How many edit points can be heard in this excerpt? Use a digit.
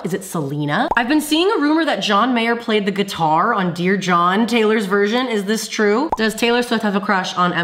2